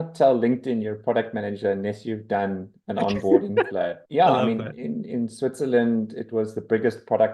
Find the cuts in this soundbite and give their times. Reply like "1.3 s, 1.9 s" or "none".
4.0 s, 4.8 s